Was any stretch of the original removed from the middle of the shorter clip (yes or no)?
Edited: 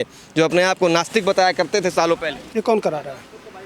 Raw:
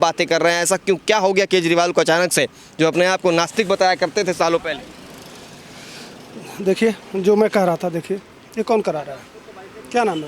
yes